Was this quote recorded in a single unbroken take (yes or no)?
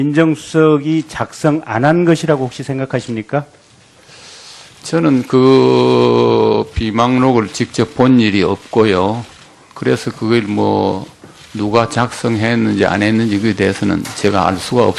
yes